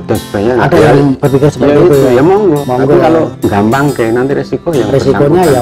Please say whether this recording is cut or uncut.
cut